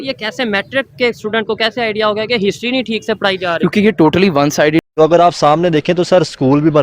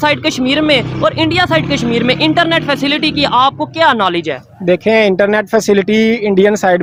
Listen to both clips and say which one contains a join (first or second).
first